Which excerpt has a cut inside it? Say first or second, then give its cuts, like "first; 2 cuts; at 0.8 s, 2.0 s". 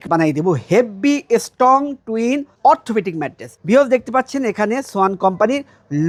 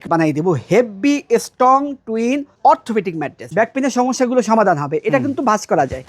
second; 1 cut; at 3.4 s